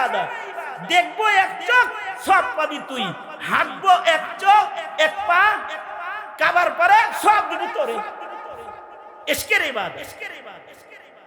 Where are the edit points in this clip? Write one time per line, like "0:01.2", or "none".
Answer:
none